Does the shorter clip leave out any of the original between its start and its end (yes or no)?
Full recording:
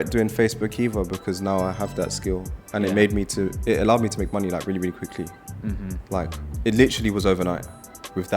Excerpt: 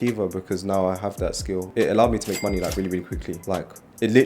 yes